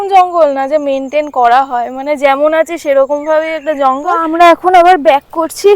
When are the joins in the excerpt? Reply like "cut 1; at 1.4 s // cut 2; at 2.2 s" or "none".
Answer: cut 1; at 4.2 s